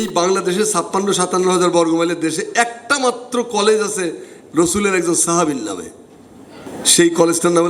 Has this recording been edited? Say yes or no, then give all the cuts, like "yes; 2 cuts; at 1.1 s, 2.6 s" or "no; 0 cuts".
no; 0 cuts